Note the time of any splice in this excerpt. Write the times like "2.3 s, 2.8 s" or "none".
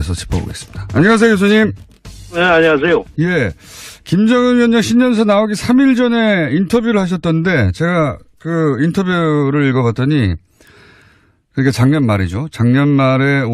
none